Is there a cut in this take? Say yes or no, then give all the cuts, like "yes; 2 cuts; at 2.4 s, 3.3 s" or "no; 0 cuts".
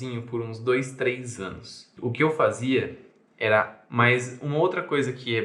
yes; 2 cuts; at 1.9 s, 3.8 s